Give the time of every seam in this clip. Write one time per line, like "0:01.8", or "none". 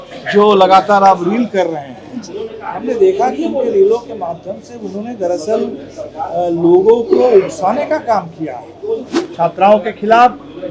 0:09.2